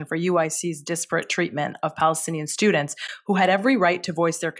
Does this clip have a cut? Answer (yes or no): no